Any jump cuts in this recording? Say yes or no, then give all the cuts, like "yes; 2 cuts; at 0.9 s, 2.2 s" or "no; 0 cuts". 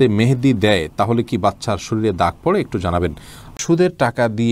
yes; 1 cut; at 3.5 s